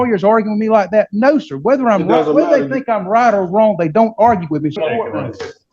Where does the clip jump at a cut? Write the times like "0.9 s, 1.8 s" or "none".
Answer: 4.8 s

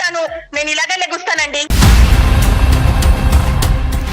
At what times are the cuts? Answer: 1.7 s

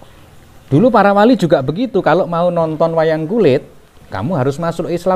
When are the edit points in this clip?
none

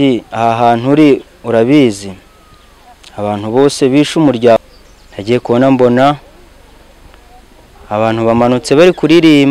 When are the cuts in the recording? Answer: 4.6 s

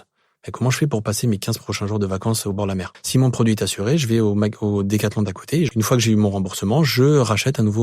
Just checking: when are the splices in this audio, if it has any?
2.9 s, 5.7 s

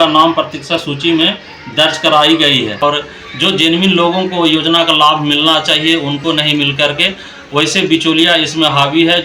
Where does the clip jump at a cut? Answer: 2.8 s

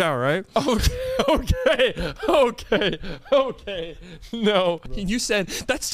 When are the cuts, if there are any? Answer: 4.9 s

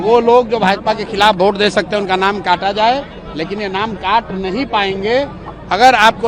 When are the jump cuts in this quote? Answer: none

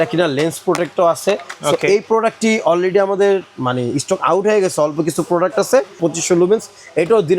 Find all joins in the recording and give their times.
6.0 s

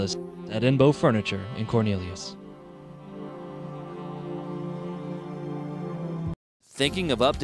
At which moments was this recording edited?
6.5 s

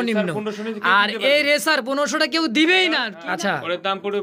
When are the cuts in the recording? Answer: 3.1 s

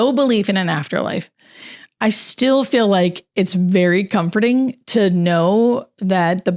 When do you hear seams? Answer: none

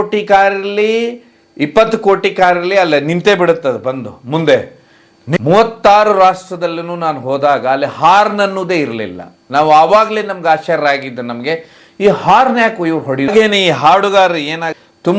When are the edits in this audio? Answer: 5.2 s, 13.3 s

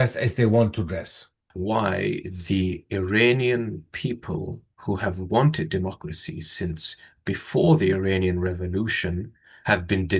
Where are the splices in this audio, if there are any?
1.6 s

